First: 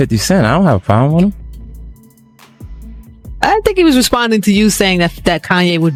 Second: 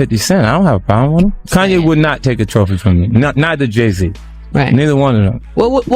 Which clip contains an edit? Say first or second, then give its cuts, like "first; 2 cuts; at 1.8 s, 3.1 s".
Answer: second; 1 cut; at 1.4 s